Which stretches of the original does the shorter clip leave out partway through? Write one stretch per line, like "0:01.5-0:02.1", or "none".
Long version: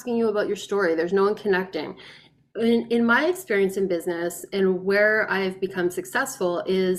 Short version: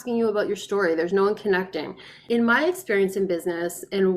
0:02.2-0:02.9